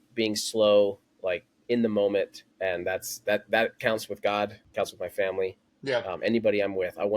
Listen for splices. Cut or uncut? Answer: cut